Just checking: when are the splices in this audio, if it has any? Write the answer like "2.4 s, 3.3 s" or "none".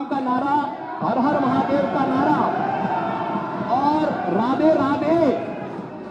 none